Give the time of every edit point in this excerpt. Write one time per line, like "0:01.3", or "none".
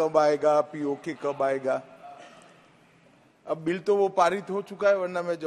none